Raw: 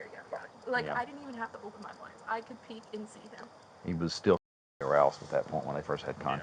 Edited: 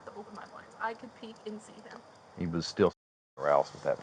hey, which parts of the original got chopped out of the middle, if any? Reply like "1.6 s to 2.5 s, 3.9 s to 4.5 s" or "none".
none